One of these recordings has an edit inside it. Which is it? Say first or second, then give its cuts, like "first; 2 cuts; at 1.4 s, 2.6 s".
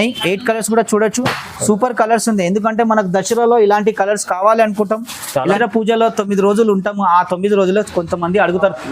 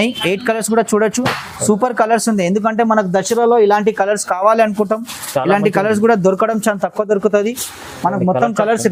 first; 1 cut; at 5.6 s